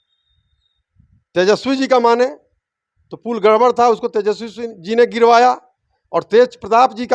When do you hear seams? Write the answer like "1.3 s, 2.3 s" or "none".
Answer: none